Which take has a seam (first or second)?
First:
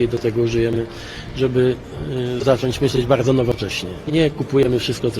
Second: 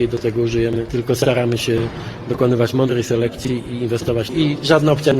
second